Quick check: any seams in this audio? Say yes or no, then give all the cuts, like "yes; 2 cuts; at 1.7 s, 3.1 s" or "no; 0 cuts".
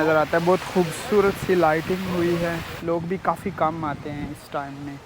yes; 1 cut; at 2.7 s